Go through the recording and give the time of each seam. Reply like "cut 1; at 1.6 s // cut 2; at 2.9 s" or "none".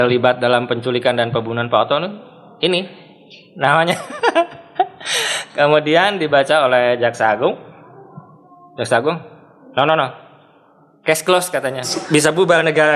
cut 1; at 12.0 s